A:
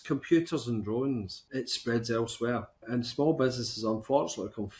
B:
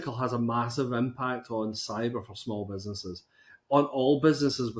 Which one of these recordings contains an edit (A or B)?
A